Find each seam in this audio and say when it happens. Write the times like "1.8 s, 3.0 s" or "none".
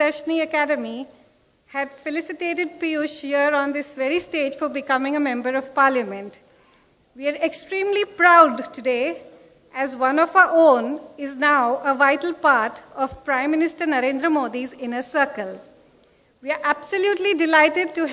1.3 s